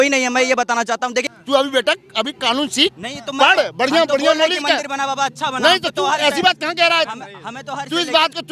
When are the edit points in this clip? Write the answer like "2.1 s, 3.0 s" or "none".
1.2 s

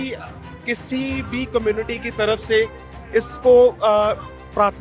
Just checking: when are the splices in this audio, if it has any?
none

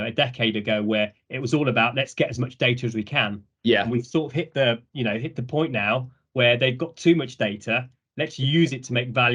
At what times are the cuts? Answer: none

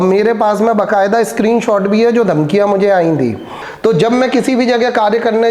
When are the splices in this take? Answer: 3.6 s

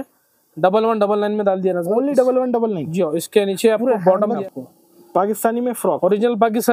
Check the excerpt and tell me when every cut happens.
4.4 s

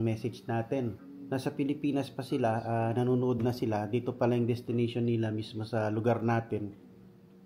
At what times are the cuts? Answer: 1.1 s

